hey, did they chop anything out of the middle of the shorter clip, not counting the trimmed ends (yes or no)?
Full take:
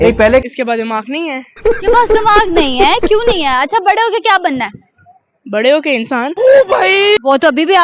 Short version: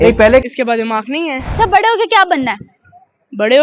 yes